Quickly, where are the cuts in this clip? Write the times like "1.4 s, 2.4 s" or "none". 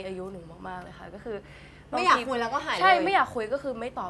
none